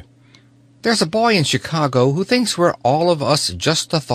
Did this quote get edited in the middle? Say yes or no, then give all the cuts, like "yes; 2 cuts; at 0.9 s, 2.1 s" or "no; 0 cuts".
yes; 1 cut; at 2.8 s